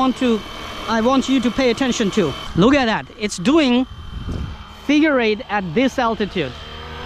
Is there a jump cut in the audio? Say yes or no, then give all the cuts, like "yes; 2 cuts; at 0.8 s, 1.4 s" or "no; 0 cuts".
yes; 1 cut; at 2.4 s